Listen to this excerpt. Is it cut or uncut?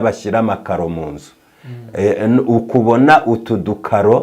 uncut